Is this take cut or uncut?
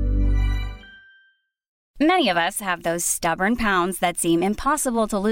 cut